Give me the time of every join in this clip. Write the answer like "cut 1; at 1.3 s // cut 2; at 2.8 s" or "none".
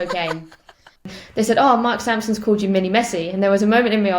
cut 1; at 1.1 s